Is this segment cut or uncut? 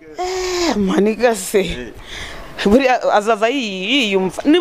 uncut